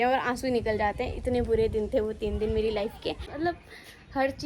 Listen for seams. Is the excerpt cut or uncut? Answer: cut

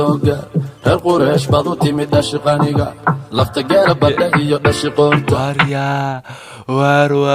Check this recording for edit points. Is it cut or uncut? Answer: cut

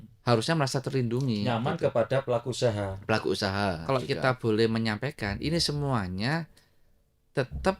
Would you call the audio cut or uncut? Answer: cut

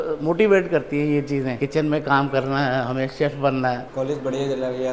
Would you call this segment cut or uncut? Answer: cut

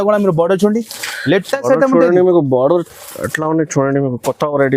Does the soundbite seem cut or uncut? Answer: uncut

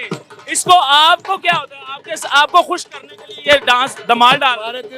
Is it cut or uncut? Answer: uncut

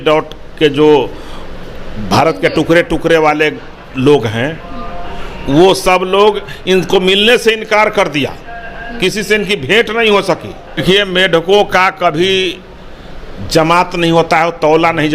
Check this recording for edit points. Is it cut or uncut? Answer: cut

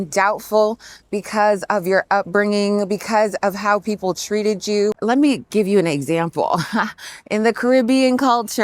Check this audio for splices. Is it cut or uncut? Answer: uncut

